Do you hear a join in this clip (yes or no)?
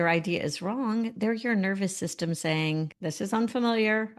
yes